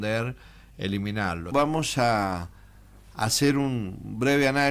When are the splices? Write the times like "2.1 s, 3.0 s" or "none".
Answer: 1.5 s